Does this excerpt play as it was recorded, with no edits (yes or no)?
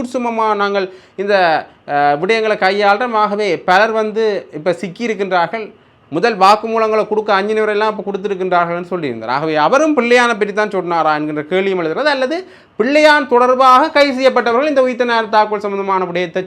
yes